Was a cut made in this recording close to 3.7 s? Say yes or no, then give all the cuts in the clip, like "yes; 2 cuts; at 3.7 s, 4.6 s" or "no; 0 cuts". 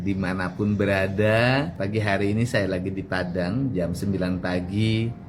no; 1 cut; at 1.8 s